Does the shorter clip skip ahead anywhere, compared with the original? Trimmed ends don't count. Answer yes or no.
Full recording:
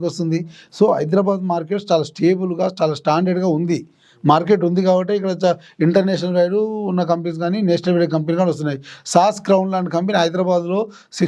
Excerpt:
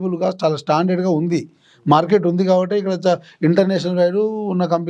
no